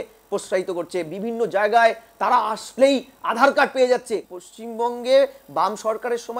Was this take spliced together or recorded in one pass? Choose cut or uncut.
cut